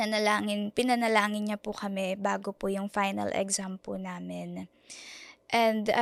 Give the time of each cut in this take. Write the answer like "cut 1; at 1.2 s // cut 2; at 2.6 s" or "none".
none